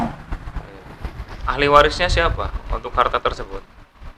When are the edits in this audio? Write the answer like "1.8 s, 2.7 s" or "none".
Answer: 1.3 s